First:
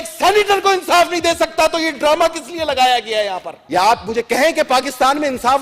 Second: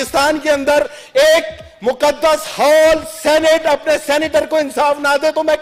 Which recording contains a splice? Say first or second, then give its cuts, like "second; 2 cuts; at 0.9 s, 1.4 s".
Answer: first; 1 cut; at 3.5 s